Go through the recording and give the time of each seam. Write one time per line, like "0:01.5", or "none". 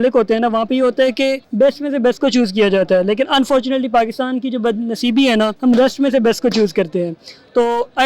0:01.4
0:05.5